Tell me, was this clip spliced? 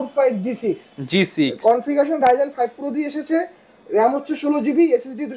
no; 0 cuts

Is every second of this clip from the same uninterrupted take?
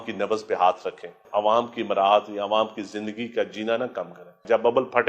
no; 2 cuts; at 1.2 s, 3.9 s

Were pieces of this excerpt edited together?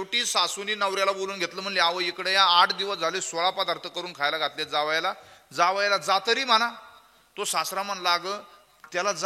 no; 0 cuts

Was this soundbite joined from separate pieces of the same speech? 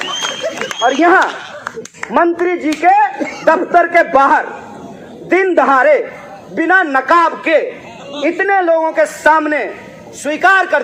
no; 0 cuts

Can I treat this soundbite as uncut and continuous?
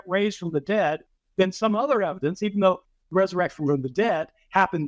no; 1 cut; at 2.3 s

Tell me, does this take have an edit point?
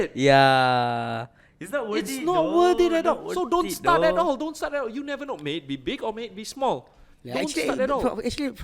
no; 0 cuts

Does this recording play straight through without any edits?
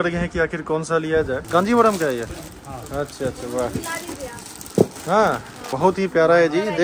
no; 2 cuts; at 1.4 s, 5.7 s

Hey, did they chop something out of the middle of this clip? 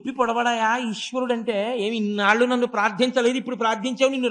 no; 0 cuts

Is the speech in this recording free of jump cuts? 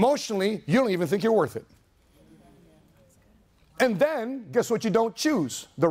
yes; 0 cuts

